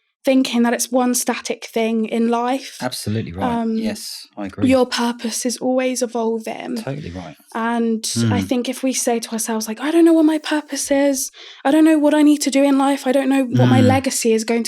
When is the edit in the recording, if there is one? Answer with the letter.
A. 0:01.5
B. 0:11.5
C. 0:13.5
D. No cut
C